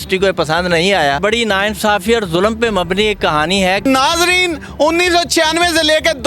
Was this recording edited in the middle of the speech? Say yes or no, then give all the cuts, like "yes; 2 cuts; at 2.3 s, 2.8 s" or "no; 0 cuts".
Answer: yes; 2 cuts; at 1.2 s, 3.8 s